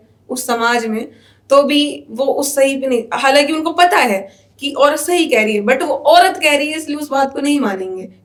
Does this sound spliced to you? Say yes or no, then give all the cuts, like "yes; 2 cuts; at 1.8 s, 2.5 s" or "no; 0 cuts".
no; 0 cuts